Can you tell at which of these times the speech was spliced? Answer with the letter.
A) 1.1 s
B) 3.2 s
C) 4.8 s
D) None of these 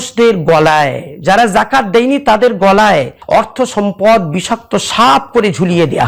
B